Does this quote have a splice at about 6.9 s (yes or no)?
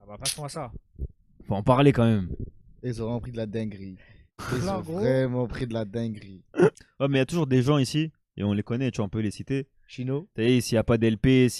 yes